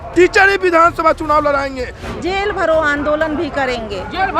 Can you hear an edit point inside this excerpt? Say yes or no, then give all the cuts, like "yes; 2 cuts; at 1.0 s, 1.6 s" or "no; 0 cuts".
yes; 1 cut; at 2.1 s